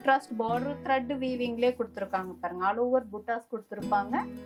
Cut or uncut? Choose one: uncut